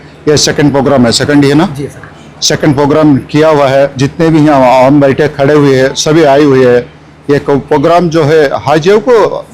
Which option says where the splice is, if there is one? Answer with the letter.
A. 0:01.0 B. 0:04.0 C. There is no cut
B